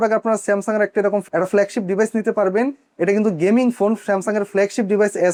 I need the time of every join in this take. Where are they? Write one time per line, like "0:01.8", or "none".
none